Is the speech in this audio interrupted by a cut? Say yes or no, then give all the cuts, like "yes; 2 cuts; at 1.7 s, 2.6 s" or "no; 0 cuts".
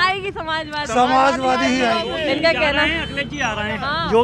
no; 0 cuts